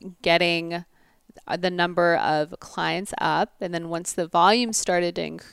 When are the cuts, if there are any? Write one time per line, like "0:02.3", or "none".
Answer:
none